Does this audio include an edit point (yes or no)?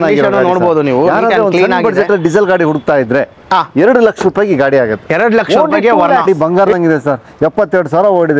yes